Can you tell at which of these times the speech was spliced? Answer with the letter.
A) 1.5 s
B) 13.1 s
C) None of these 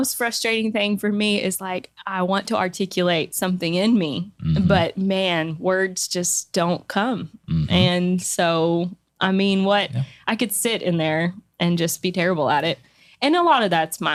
C